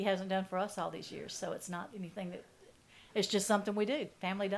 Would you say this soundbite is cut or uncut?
uncut